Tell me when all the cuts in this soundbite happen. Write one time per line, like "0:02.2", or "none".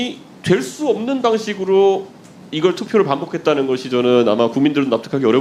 none